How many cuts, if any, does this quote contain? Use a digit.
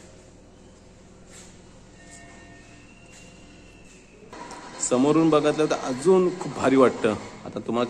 1